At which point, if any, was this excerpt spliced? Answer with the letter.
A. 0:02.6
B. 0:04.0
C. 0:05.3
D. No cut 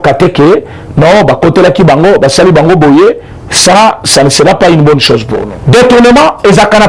C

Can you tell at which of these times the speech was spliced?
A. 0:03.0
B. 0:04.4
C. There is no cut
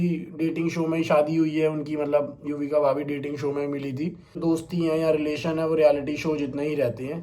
B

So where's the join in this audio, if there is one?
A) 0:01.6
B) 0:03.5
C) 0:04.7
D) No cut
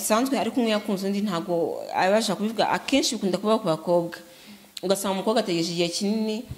D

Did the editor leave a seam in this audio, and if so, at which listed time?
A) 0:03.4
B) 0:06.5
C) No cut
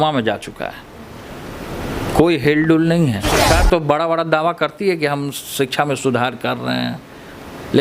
A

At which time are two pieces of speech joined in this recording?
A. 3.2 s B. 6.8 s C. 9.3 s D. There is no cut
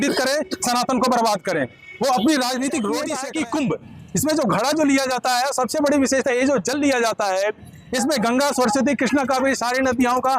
A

